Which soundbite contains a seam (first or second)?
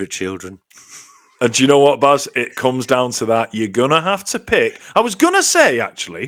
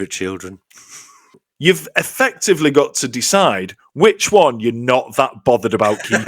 second